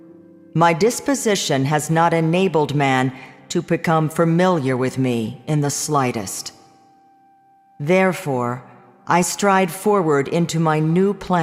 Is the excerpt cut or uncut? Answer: uncut